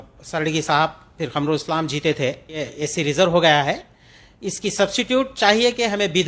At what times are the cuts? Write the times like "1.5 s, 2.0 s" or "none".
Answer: 2.8 s

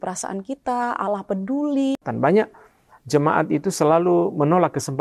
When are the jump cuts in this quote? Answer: 2.0 s

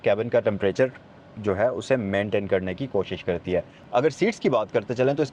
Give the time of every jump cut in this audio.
3.8 s

